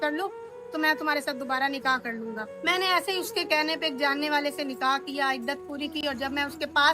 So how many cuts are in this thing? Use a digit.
1